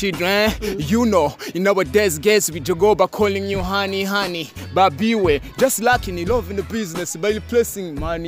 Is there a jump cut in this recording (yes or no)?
no